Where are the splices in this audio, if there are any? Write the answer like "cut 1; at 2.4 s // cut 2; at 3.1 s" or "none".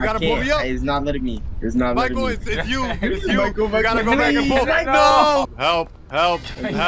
cut 1; at 5.5 s